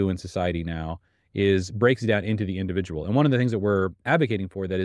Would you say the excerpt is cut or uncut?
uncut